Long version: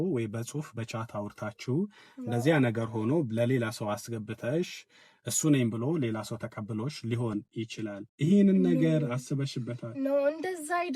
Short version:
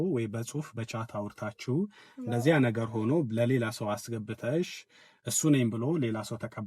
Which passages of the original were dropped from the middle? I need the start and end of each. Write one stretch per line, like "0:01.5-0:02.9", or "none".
none